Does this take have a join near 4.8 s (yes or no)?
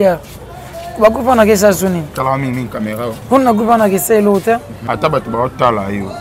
yes